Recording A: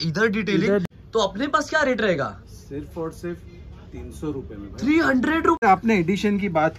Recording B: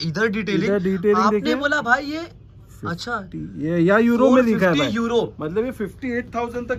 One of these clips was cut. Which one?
A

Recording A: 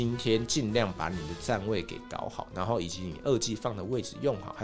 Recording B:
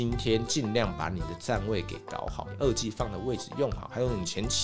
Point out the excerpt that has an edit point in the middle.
B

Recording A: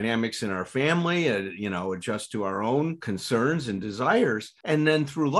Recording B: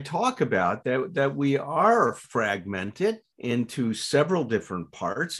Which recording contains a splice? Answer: A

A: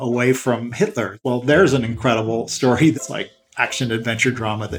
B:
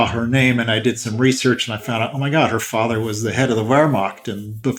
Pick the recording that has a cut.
A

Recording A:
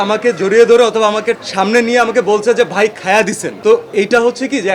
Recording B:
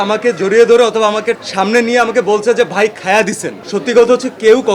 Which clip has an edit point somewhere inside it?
B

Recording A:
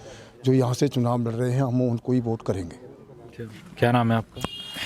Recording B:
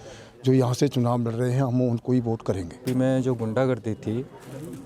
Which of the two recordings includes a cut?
B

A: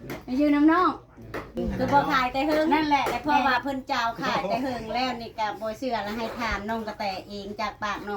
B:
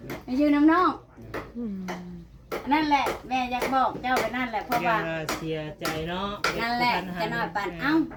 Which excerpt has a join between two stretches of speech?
A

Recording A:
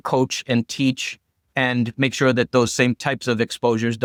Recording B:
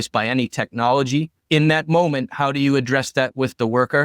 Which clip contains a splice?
B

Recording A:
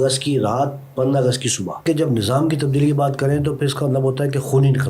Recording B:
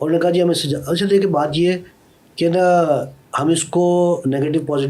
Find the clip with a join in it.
A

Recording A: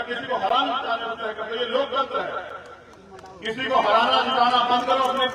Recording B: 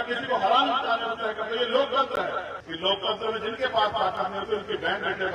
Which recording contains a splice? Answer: B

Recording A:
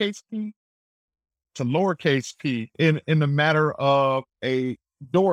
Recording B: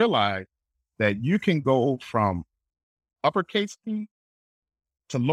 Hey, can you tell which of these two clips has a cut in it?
A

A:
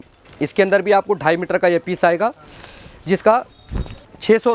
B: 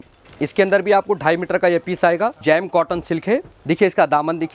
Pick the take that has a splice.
B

